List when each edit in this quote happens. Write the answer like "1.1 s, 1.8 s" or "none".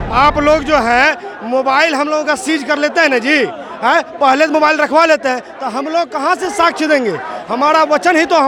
none